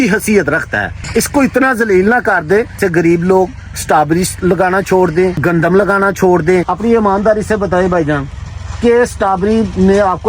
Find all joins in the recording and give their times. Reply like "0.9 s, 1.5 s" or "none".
1.0 s, 2.8 s, 5.4 s, 6.7 s